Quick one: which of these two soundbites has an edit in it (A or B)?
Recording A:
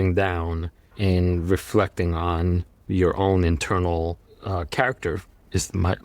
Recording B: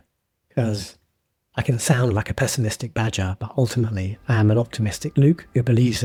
A